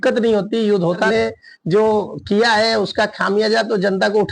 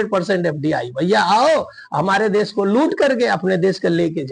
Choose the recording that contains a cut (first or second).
first